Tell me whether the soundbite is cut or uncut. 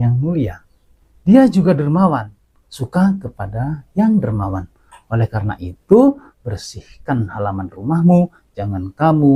uncut